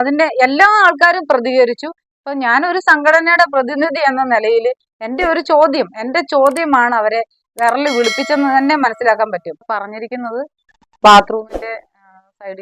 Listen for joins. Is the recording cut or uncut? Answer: cut